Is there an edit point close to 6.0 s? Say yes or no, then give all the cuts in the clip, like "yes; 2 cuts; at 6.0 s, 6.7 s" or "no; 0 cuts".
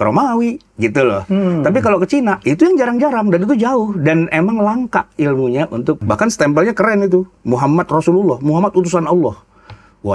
yes; 1 cut; at 6.0 s